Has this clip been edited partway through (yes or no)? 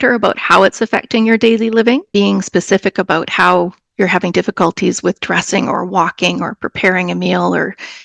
yes